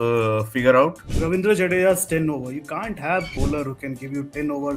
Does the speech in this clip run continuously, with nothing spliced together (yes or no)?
no